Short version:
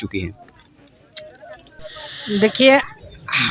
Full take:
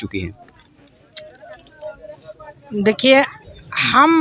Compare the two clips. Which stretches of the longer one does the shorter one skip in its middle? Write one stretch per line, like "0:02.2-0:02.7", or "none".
0:01.8-0:02.2